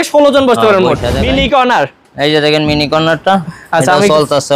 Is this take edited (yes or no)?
yes